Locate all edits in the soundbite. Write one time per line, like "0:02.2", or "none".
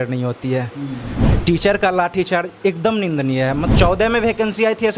0:03.7